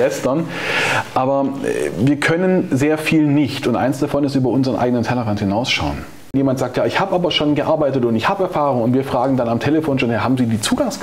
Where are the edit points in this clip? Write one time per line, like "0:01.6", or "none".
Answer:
0:06.3